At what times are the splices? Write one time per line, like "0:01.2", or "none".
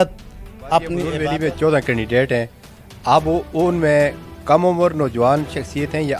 0:01.1